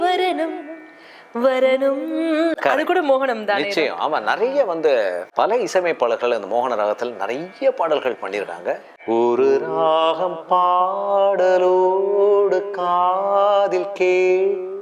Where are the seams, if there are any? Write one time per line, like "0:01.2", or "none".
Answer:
0:05.2
0:08.9